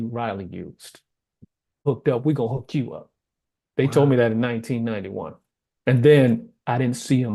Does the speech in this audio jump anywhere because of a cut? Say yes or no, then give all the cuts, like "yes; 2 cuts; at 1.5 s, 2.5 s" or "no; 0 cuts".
yes; 1 cut; at 1.8 s